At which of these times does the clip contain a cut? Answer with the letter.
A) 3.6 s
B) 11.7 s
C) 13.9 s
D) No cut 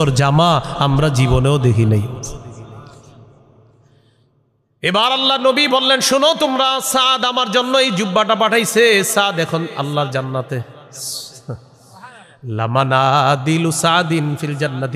D